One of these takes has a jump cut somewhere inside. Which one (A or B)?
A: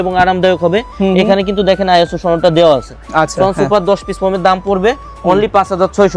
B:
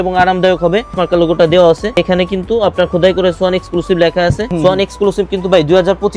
B